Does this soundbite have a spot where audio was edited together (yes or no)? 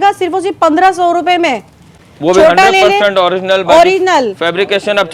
no